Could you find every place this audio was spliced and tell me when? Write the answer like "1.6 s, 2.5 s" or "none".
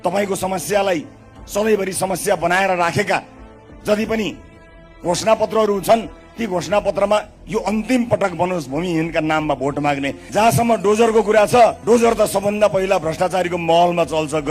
10.2 s, 11.8 s